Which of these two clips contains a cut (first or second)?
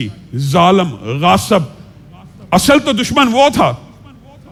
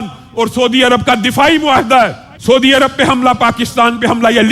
second